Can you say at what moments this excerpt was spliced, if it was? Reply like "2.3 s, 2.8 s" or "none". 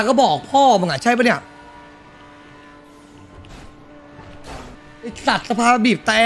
4.8 s